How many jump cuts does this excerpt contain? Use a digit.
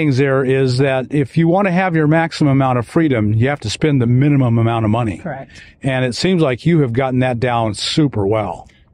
0